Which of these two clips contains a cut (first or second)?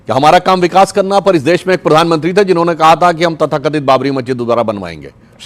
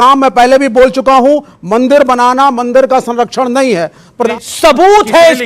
second